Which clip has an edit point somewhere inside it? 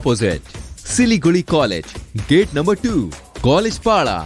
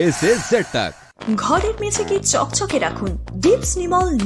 second; 1 cut; at 1.2 s

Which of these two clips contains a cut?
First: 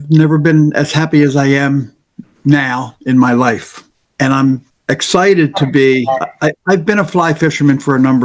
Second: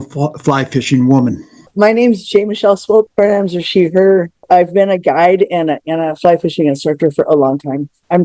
second; 3 cuts; at 1.6 s, 3.1 s, 4.4 s

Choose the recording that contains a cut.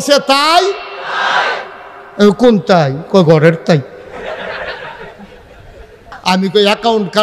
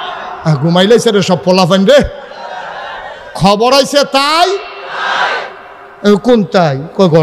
first; 1 cut; at 6.1 s

